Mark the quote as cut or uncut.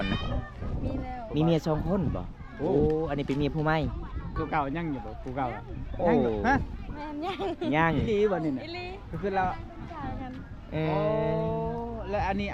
cut